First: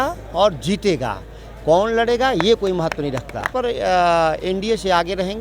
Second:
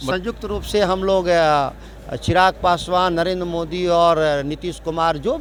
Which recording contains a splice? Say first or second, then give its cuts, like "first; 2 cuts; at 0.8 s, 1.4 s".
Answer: first; 1 cut; at 3.5 s